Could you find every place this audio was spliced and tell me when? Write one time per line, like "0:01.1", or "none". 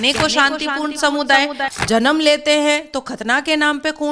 0:01.6